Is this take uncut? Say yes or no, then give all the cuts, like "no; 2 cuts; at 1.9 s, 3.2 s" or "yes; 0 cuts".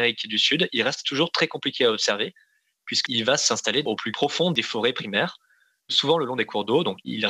no; 1 cut; at 4.1 s